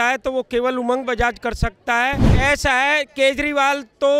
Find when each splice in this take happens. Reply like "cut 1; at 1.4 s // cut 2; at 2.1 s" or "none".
cut 1; at 2.3 s